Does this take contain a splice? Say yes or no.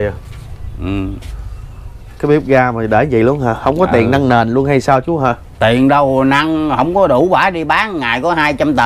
no